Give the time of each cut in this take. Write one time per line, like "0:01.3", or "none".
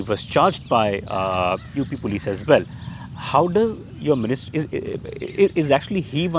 none